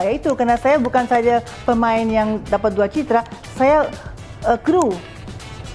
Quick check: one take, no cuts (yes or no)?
yes